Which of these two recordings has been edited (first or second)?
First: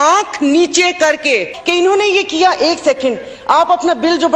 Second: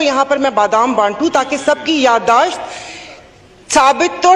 first